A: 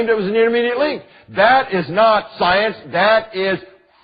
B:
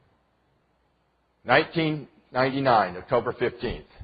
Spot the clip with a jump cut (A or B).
B